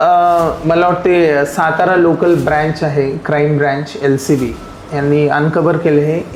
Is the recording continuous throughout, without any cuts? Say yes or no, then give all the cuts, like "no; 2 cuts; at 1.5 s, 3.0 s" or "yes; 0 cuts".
yes; 0 cuts